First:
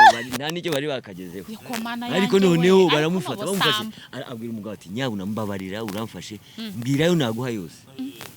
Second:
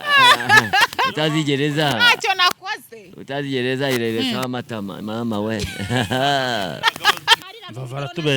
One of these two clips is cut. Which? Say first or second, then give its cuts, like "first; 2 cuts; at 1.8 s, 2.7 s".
second; 1 cut; at 7.4 s